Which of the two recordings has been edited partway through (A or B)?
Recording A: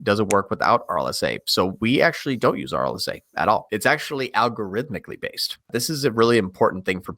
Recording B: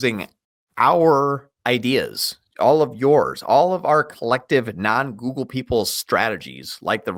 A